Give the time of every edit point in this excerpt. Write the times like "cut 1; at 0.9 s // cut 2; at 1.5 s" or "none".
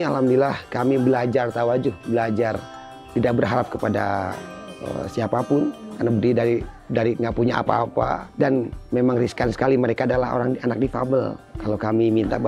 cut 1; at 3.0 s // cut 2; at 8.2 s // cut 3; at 11.5 s